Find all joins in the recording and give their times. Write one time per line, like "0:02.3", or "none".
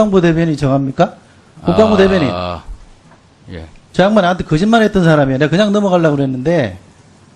0:02.5